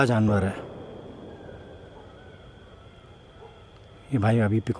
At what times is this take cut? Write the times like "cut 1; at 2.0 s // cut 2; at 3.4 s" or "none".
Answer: none